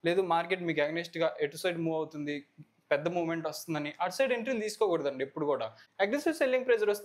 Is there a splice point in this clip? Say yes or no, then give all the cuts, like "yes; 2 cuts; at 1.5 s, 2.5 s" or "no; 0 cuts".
yes; 1 cut; at 5.8 s